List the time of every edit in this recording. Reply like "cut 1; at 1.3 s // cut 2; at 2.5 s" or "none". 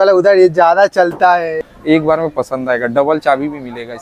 cut 1; at 1.5 s